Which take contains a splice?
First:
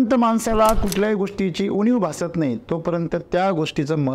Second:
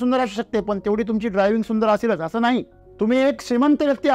second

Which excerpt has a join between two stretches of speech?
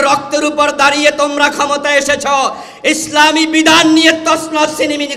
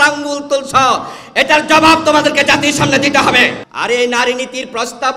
second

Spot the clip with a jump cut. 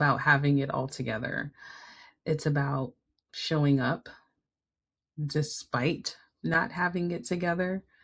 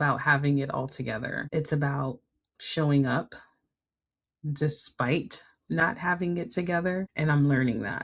second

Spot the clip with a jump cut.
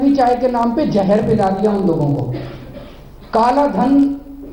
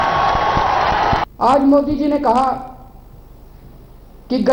second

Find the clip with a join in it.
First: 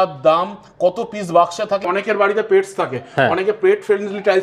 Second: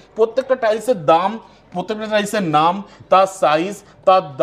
first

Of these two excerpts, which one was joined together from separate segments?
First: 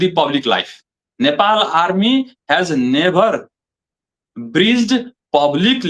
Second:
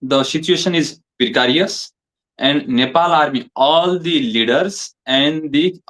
first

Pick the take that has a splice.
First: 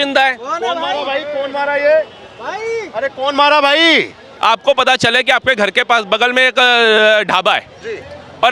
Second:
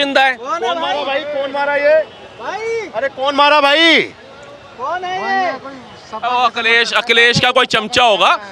first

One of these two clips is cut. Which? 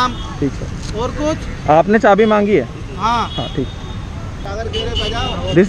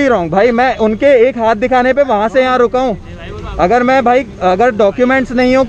first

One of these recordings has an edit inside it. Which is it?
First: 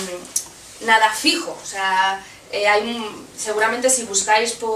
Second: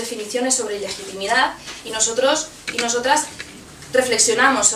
second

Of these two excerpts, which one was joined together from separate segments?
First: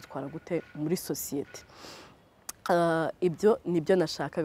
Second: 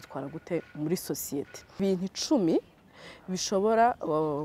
second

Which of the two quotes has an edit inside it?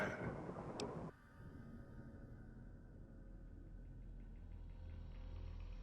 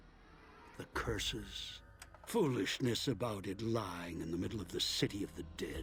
first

